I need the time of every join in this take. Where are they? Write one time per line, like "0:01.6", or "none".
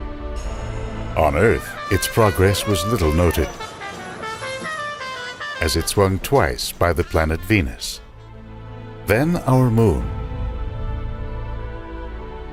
none